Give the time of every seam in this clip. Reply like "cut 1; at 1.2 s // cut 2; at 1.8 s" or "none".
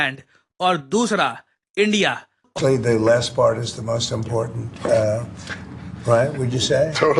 cut 1; at 2.5 s

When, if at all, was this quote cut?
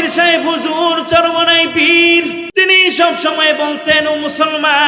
cut 1; at 2.4 s

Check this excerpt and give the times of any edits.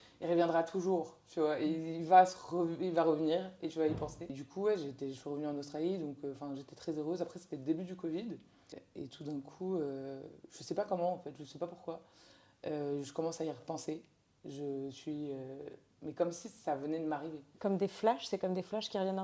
cut 1; at 4.4 s // cut 2; at 8.8 s

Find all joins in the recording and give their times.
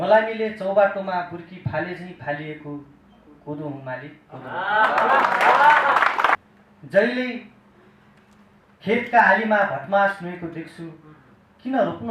cut 1; at 6.4 s

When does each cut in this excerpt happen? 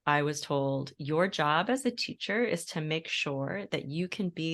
none

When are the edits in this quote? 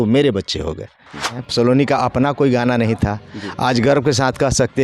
cut 1; at 1.4 s

